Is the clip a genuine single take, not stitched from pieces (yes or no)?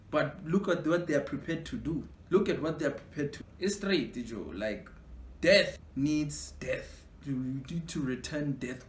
no